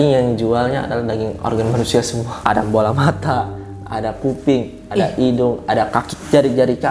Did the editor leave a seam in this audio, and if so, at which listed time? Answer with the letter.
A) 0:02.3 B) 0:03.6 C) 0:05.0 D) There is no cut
A